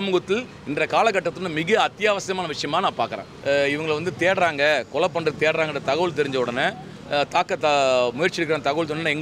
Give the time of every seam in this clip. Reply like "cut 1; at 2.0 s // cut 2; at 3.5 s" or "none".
cut 1; at 3.3 s